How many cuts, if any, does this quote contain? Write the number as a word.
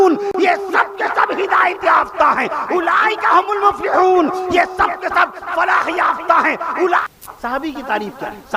one